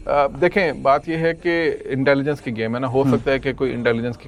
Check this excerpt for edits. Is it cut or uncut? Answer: uncut